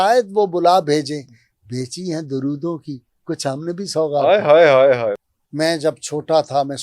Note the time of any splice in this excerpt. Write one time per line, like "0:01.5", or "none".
0:05.1

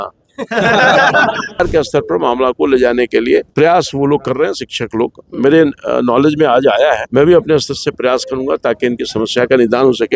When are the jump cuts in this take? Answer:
0:01.6
0:03.5
0:07.0

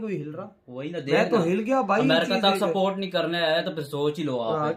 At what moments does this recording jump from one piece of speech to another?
none

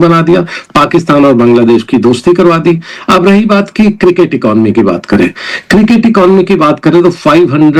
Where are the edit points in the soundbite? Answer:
none

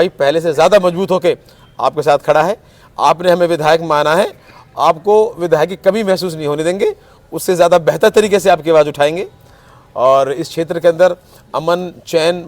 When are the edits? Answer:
none

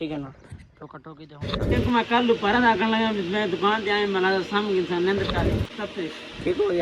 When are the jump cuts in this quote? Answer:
0:01.7
0:05.7

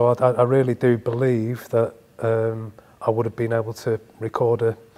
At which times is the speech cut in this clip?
none

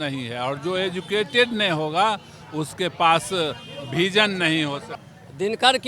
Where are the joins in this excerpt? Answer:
0:04.9

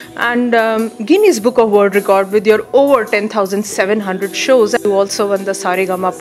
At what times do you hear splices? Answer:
0:04.8

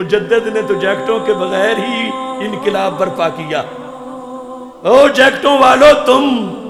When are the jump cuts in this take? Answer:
none

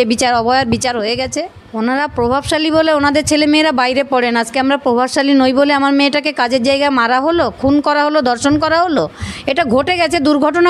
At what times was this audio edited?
0:01.6

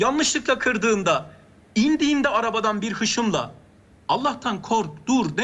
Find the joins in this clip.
none

